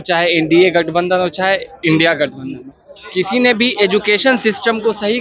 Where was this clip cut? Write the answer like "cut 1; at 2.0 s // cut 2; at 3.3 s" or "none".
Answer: none